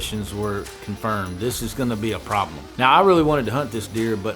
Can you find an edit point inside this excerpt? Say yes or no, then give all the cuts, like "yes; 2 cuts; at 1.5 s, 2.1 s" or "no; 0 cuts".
yes; 1 cut; at 2.6 s